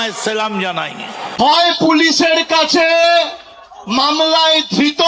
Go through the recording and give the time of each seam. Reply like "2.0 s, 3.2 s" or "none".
1.4 s